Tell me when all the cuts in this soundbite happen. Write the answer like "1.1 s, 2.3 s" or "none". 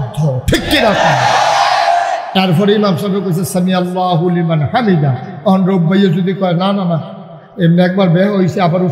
none